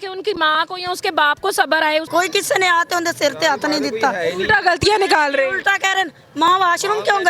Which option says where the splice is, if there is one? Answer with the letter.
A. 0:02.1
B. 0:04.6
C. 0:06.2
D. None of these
A